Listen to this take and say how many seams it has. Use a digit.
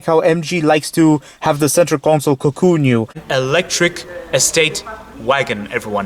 1